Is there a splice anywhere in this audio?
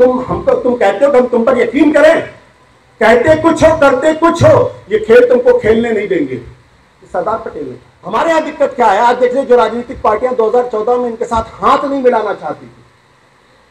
yes; 1 cut; at 7.9 s

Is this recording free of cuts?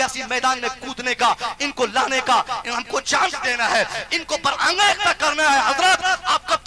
yes; 0 cuts

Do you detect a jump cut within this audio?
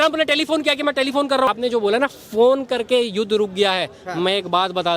yes; 1 cut; at 1.5 s

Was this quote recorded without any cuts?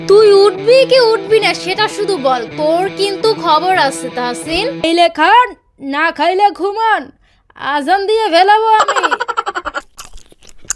no; 2 cuts; at 4.8 s, 9.8 s

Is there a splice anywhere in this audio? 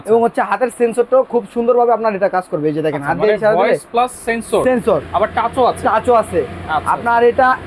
no; 0 cuts

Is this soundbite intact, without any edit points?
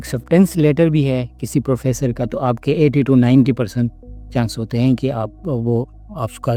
yes; 0 cuts

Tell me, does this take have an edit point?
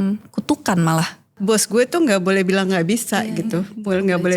yes; 1 cut; at 1.3 s

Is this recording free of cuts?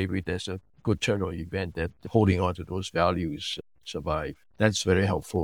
no; 1 cut; at 4.5 s

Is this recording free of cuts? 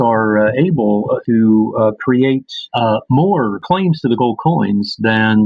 no; 3 cuts; at 1.2 s, 2.6 s, 3.6 s

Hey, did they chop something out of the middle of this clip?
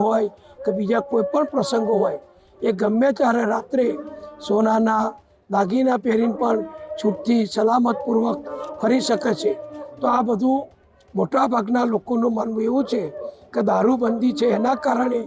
no; 0 cuts

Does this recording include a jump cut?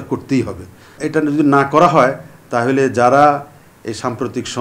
yes; 1 cut; at 1.0 s

